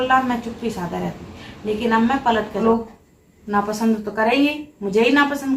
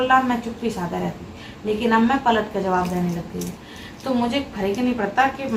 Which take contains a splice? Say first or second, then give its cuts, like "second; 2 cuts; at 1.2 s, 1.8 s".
first; 1 cut; at 2.6 s